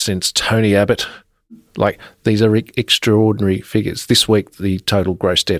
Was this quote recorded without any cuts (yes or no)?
no